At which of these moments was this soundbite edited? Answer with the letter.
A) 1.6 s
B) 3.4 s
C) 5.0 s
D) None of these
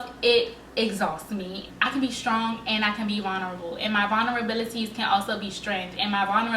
A